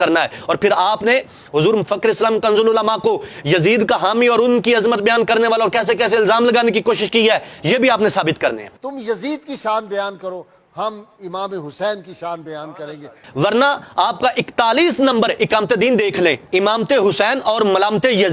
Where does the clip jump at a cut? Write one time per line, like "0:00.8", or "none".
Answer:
0:13.2